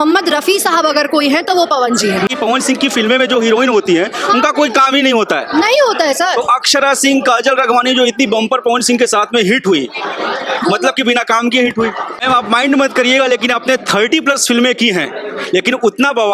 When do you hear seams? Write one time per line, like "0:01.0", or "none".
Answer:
0:02.3
0:12.2